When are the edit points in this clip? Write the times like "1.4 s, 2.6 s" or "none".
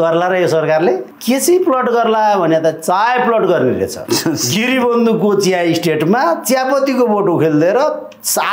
1.1 s, 4.0 s